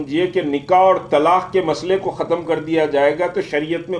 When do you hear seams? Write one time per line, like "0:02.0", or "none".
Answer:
none